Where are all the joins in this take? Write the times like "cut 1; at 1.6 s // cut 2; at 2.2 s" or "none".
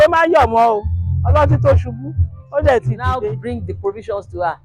cut 1; at 3.2 s

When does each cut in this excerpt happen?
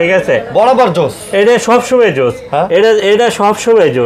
none

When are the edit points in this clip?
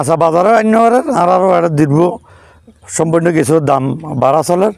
none

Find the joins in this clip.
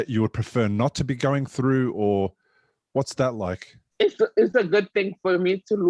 cut 1; at 3.9 s

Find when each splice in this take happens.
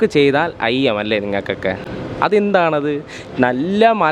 none

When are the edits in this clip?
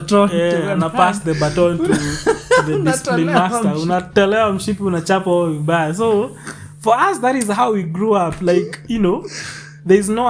none

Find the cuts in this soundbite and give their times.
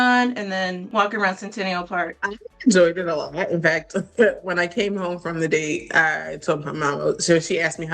cut 1; at 0.8 s // cut 2; at 2.2 s

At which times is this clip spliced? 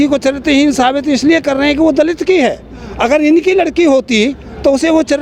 none

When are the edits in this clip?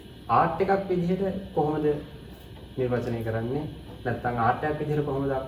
none

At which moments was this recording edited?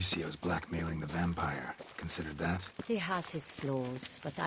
cut 1; at 2.7 s

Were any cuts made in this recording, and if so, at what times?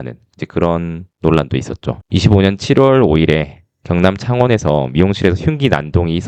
cut 1; at 2.0 s

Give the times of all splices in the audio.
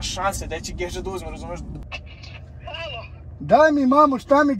cut 1; at 1.8 s

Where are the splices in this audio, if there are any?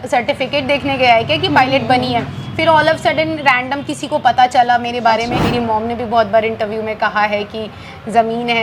cut 1; at 5.4 s

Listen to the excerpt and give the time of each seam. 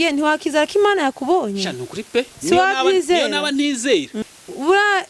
cut 1; at 4.1 s

